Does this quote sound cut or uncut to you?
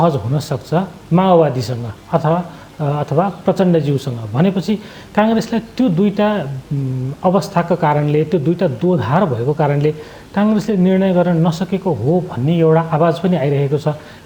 uncut